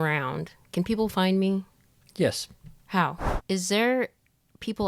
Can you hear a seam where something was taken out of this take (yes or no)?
yes